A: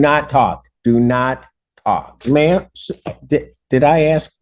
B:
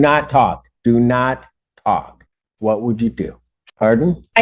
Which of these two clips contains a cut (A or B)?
A